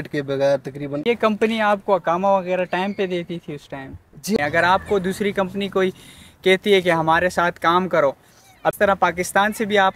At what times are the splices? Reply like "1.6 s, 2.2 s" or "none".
1.0 s, 4.4 s, 8.7 s